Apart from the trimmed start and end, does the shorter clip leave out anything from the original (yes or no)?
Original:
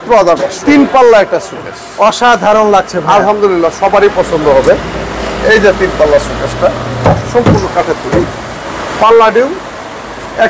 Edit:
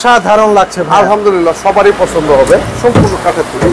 yes